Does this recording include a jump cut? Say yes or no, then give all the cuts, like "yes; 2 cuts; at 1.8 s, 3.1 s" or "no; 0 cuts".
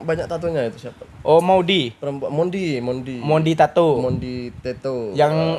no; 0 cuts